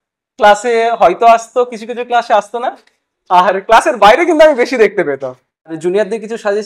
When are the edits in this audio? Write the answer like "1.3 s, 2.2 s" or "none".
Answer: 5.8 s